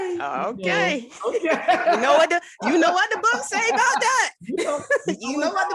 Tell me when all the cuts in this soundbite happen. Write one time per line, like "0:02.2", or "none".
none